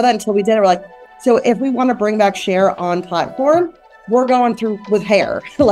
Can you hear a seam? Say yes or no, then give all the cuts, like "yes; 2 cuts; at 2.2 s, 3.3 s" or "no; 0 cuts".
no; 0 cuts